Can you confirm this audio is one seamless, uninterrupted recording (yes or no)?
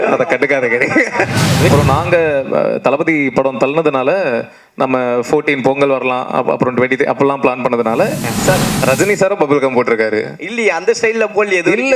no